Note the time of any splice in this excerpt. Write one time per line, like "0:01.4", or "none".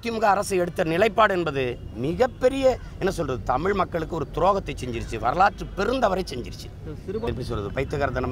0:07.3